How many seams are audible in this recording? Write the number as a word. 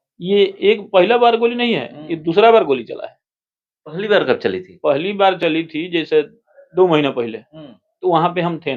zero